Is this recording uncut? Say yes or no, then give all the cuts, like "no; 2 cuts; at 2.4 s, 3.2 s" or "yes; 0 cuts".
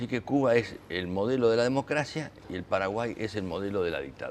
no; 1 cut; at 2.9 s